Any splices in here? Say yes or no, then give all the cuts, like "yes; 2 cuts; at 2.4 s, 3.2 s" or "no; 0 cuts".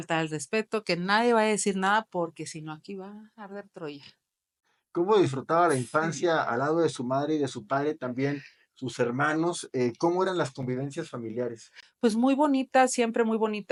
no; 0 cuts